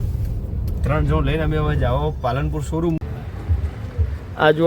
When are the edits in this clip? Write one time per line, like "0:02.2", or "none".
0:03.0